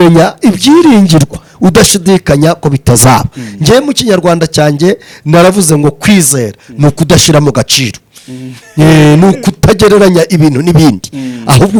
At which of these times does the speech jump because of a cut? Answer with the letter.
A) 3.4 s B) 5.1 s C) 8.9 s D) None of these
D